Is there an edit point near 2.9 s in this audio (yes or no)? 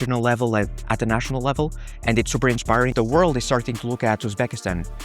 yes